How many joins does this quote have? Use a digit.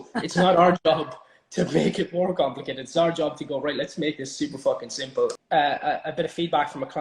1